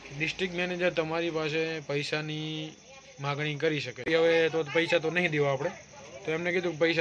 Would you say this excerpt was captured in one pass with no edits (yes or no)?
no